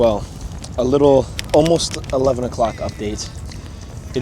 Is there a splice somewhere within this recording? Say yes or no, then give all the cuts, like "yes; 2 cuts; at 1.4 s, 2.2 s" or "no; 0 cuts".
yes; 1 cut; at 1.4 s